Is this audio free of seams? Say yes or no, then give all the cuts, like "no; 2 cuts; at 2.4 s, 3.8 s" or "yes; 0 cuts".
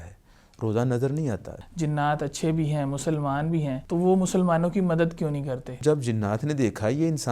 no; 3 cuts; at 1.5 s, 3.8 s, 5.7 s